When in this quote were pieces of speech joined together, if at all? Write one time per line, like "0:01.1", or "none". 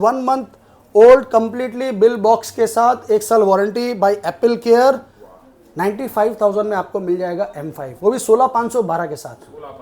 none

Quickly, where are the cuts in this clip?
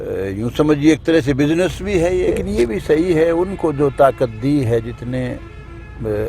0:02.4

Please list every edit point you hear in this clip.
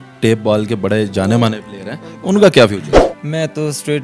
0:03.0

